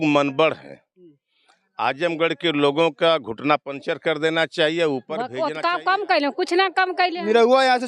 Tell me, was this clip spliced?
yes; 1 cut; at 5.3 s

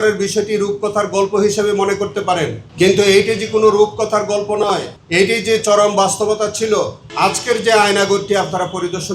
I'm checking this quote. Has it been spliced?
yes; 3 cuts; at 2.6 s, 5.0 s, 7.0 s

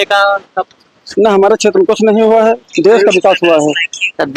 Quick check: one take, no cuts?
yes; 0 cuts

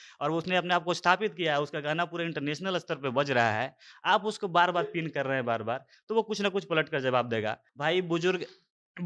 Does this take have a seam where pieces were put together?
yes; 1 cut; at 7.7 s

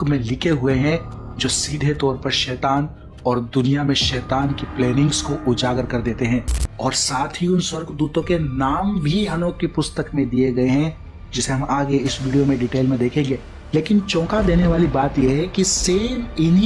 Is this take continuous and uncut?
no; 1 cut; at 6.6 s

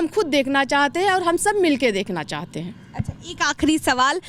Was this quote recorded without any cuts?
yes; 0 cuts

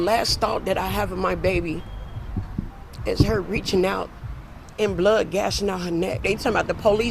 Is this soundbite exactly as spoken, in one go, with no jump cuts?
no; 1 cut; at 6.2 s

